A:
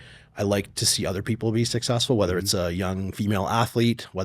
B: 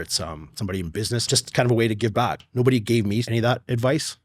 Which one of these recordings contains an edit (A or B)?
B